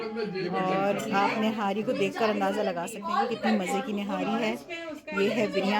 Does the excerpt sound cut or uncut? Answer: uncut